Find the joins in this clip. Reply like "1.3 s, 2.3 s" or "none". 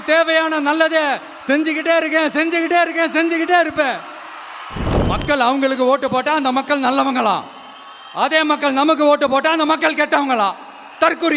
5.0 s